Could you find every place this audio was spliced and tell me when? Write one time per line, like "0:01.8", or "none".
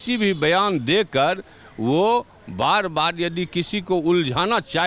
none